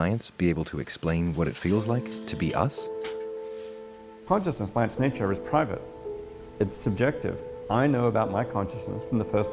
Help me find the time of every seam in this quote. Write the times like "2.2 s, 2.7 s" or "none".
3.9 s